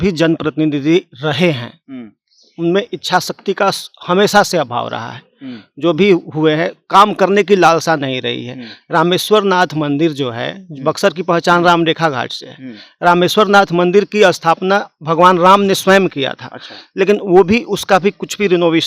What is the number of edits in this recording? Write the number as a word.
zero